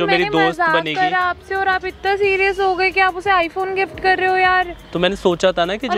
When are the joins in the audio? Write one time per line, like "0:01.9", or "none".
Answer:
none